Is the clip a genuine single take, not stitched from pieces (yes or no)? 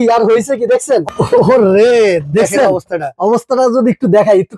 no